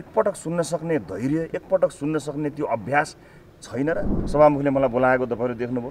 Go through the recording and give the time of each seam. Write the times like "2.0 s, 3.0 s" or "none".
4.2 s